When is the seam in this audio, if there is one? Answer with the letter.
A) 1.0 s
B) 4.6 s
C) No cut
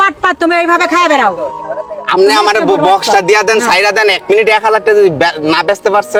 C